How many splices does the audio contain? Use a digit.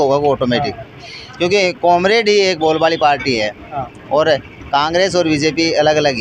0